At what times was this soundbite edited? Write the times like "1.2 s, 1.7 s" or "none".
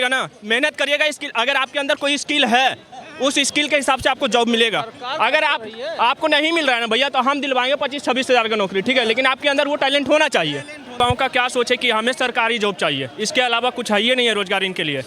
11.0 s